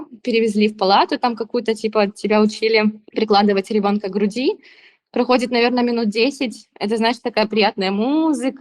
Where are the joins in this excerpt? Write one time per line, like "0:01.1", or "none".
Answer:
none